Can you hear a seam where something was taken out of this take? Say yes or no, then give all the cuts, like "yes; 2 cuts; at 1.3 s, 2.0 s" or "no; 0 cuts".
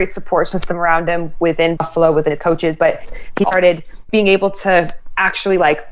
yes; 2 cuts; at 1.7 s, 4.0 s